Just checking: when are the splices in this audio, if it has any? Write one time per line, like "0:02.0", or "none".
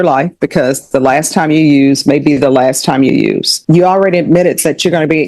0:03.5